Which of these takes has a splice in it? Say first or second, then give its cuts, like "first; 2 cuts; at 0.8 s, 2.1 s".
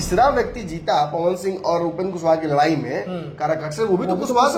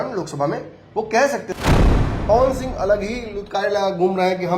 second; 1 cut; at 1.8 s